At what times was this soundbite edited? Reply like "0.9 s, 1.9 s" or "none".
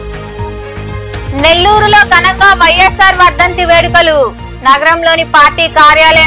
1.2 s